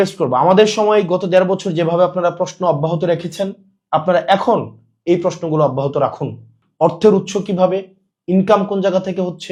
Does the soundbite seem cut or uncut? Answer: uncut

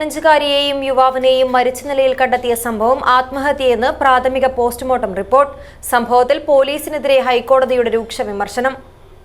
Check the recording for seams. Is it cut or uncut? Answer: uncut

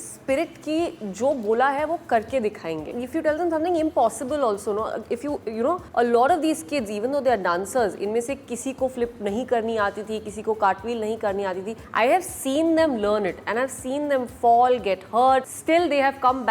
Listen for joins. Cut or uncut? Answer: uncut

